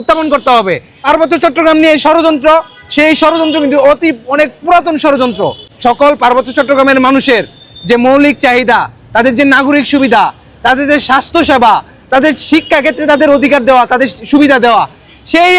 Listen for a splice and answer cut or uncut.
cut